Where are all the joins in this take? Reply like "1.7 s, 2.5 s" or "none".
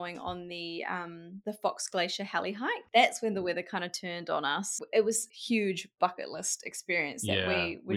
1.3 s, 2.8 s, 4.7 s, 5.3 s